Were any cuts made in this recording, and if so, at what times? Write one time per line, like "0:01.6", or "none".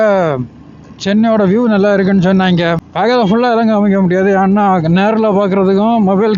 0:02.9